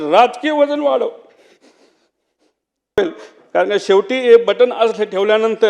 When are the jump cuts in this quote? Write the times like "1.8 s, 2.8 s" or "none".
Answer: 3.0 s